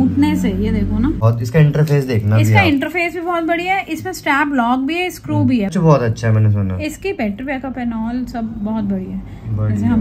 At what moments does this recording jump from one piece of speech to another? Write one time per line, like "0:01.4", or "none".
0:01.2
0:05.7